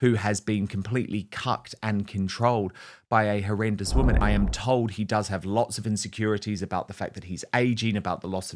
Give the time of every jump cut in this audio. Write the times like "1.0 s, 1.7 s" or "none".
4.2 s